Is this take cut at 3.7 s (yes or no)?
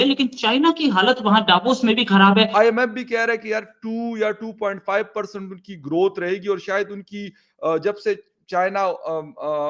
no